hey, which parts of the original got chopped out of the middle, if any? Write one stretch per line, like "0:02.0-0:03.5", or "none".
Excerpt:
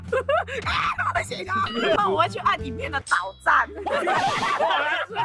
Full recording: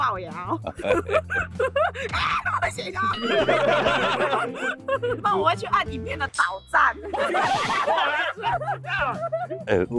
0:03.4-0:05.2